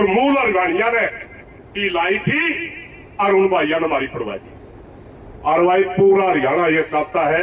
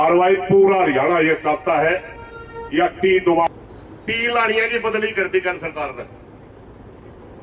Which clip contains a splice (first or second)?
second